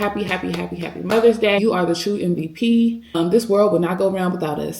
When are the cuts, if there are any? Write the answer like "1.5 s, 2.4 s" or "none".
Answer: 1.6 s, 3.2 s